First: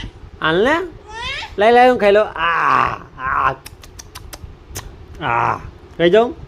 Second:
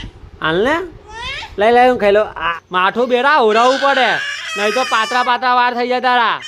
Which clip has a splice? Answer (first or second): second